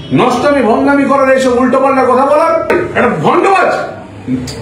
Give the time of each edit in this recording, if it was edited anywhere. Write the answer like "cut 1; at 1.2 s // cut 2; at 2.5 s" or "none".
cut 1; at 2.7 s